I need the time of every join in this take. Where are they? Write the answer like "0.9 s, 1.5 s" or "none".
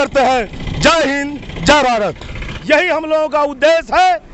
2.5 s